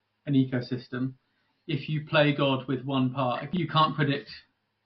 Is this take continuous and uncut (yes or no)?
no